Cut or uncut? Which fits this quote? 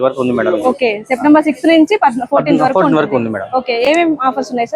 uncut